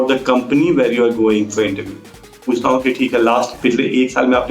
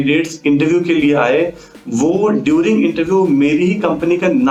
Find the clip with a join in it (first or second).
first